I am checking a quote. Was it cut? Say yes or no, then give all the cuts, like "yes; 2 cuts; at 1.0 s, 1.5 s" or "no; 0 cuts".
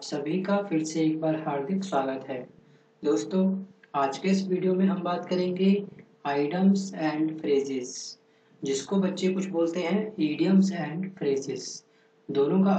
no; 0 cuts